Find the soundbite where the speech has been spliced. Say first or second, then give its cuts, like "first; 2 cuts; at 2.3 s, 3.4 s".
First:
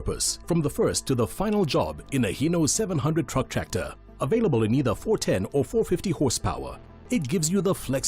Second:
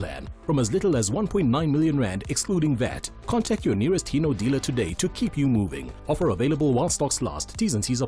first; 1 cut; at 4.8 s